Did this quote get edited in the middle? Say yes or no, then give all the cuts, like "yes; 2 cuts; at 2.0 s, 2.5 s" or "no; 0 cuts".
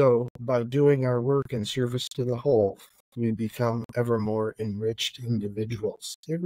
no; 0 cuts